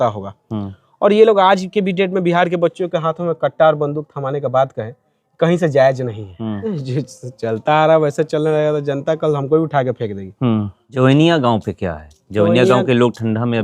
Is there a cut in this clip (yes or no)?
yes